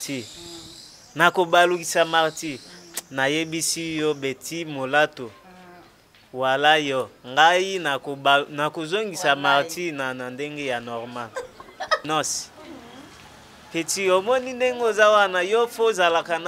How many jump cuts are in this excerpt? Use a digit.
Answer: 1